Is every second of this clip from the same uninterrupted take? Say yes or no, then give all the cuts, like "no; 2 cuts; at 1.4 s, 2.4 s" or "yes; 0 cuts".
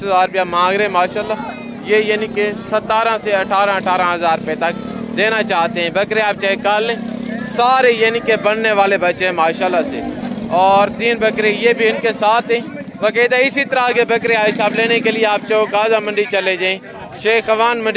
yes; 0 cuts